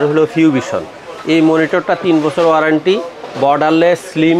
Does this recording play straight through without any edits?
yes; 0 cuts

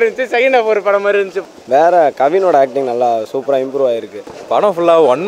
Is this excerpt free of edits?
no; 2 cuts; at 1.4 s, 4.4 s

